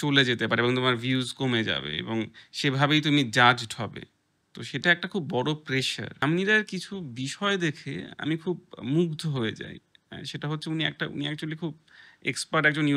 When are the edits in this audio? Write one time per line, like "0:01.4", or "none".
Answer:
0:06.2